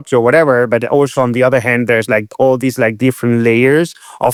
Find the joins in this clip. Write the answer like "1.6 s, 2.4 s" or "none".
none